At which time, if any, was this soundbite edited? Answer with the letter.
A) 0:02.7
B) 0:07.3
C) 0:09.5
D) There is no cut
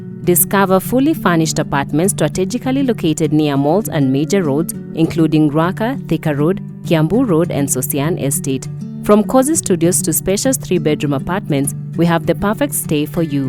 D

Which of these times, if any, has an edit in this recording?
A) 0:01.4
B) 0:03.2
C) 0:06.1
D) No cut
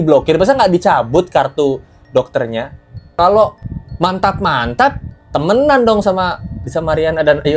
B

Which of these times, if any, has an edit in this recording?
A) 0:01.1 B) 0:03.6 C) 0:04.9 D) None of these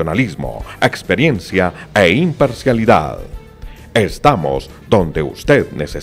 D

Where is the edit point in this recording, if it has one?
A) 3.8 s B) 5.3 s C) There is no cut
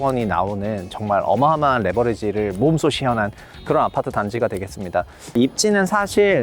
B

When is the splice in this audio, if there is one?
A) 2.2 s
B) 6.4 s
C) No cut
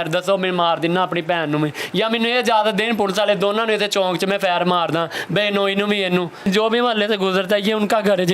B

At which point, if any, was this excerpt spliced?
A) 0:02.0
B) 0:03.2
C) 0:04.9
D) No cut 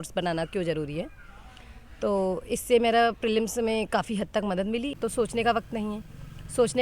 C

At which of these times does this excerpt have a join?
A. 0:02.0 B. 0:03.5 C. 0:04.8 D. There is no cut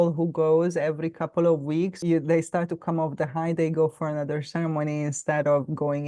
A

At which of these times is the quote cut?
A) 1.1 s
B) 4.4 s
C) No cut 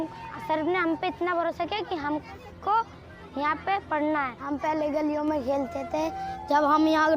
B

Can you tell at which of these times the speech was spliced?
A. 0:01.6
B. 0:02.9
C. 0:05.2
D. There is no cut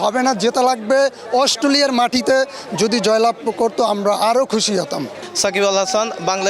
C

